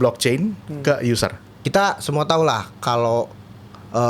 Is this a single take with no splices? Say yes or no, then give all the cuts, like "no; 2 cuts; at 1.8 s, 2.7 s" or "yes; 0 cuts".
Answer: no; 1 cut; at 1.5 s